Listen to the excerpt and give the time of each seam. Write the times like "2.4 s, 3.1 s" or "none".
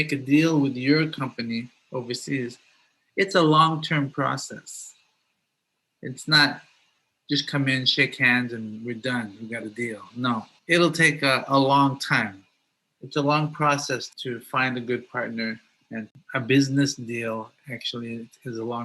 16.0 s